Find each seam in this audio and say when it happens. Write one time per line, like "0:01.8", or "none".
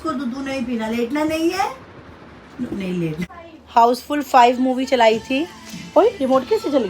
0:03.3